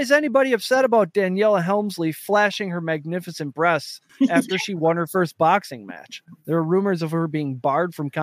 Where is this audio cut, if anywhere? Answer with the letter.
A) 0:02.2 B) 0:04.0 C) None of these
A